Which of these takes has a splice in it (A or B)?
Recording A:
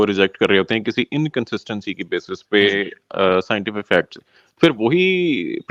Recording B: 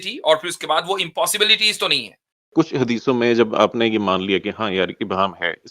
B